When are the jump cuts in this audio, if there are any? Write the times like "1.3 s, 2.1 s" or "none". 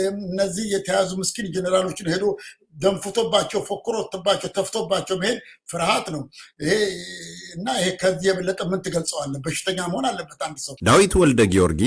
10.7 s